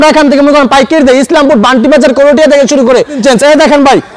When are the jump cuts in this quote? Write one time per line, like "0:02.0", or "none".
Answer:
0:03.2